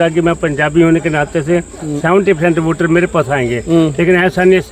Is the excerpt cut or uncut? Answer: uncut